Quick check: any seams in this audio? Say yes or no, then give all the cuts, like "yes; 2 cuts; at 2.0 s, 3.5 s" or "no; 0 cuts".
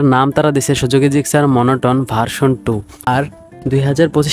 yes; 1 cut; at 2.9 s